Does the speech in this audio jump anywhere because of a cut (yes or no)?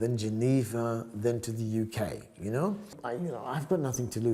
yes